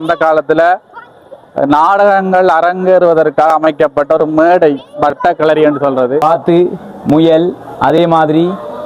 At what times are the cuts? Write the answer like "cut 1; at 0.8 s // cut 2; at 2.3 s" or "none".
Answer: cut 1; at 6.2 s

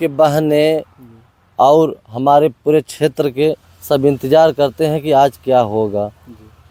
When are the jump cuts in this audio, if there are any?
none

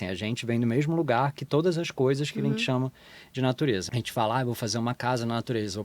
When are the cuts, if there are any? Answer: cut 1; at 3.9 s

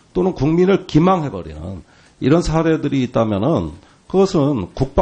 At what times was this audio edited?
cut 1; at 2.5 s

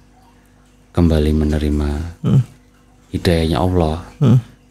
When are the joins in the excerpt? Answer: none

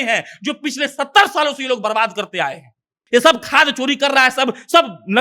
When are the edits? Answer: cut 1; at 2.9 s

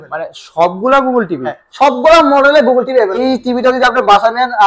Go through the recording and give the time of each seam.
cut 1; at 3.2 s

